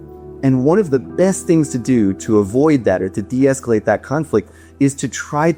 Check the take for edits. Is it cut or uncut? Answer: uncut